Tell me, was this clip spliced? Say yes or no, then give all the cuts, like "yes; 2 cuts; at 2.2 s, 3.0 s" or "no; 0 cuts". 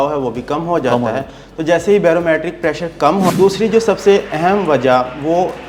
yes; 1 cut; at 3.3 s